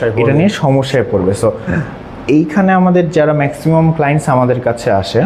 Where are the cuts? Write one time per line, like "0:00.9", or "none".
none

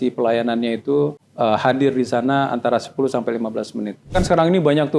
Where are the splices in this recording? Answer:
0:01.2
0:04.1

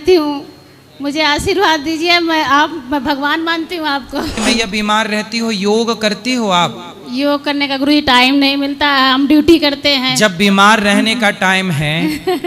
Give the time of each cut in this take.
0:04.4

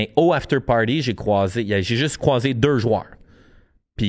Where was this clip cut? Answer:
none

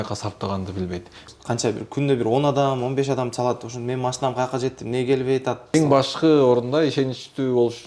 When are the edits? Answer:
0:01.2
0:05.7

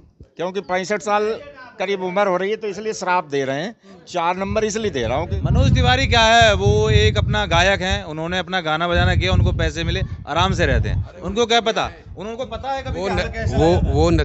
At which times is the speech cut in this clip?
0:05.3

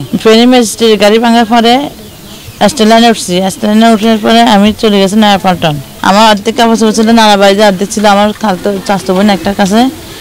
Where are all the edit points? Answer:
0:05.9

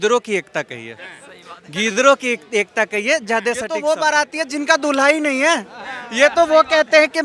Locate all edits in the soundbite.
0:03.7

